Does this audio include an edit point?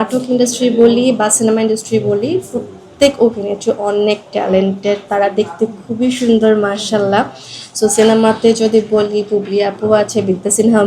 no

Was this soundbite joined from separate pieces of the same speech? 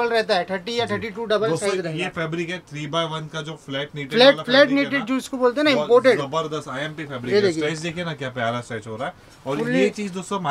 no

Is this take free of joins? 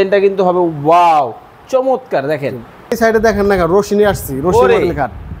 no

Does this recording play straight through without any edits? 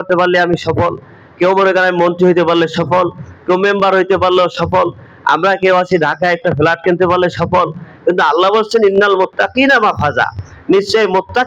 yes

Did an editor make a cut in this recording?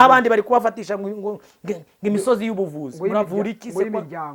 no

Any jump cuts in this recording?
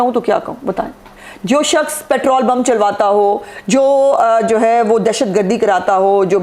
no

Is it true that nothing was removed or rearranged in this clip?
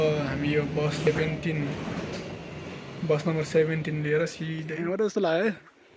no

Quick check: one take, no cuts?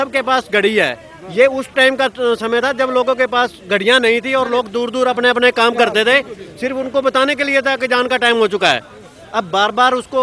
yes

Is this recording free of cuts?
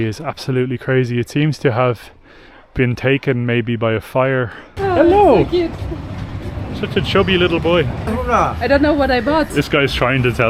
no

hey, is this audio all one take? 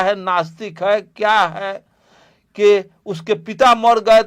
yes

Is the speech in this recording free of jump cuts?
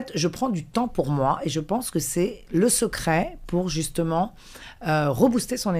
yes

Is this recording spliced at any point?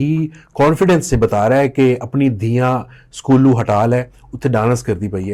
no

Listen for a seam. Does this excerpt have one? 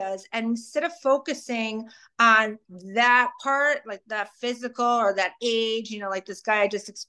no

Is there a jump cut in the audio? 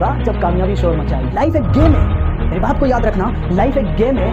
yes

